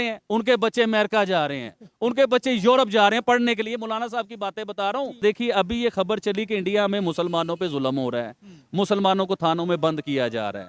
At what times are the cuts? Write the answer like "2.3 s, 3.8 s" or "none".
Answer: 5.2 s